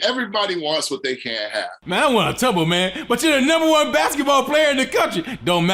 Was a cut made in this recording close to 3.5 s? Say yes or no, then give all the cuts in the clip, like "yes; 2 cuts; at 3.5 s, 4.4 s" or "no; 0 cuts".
no; 1 cut; at 1.9 s